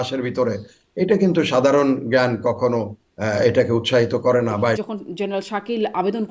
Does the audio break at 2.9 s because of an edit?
no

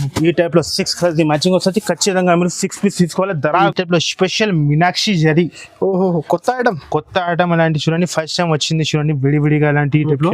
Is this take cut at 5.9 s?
no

